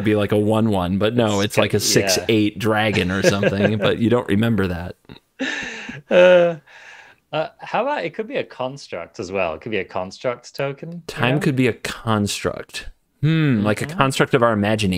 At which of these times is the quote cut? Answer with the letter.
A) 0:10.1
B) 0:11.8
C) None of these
C